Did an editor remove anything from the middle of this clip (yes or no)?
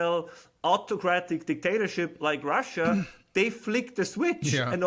no